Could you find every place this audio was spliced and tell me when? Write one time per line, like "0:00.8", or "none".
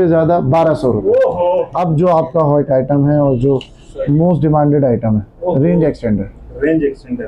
0:01.7